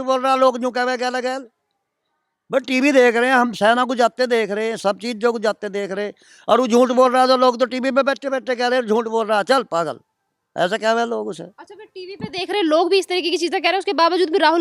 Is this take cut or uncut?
uncut